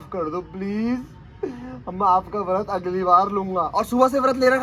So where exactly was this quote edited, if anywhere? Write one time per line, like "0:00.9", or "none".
none